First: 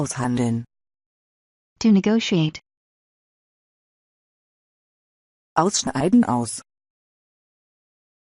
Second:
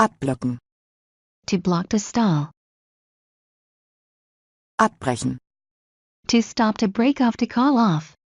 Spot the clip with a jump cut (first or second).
first